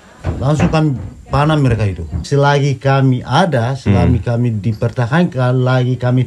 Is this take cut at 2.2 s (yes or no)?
yes